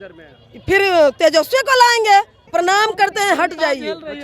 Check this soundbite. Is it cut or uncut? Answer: cut